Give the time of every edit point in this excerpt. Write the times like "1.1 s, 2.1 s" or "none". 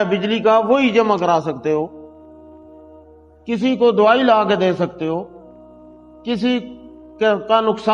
2.0 s, 3.4 s